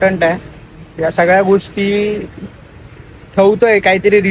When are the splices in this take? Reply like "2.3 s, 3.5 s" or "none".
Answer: none